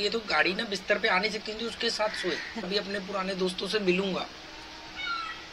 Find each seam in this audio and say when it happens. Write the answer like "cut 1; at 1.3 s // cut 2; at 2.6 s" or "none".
cut 1; at 2.7 s